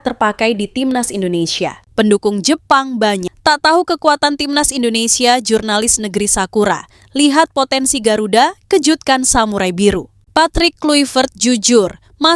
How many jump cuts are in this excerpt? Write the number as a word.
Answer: two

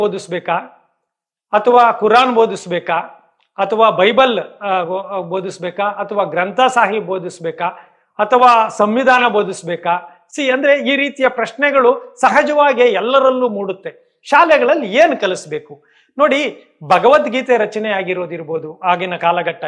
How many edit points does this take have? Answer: zero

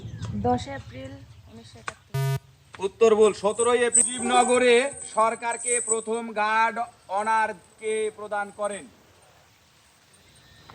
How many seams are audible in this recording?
one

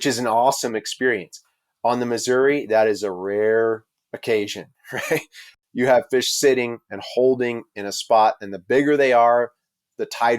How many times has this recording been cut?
one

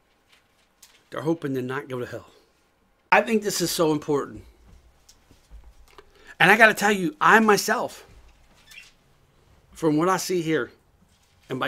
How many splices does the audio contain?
one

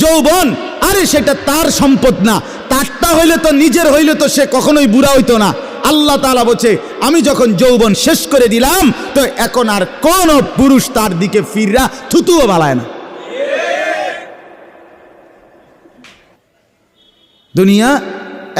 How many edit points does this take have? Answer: one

